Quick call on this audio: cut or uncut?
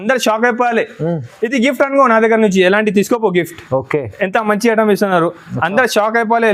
uncut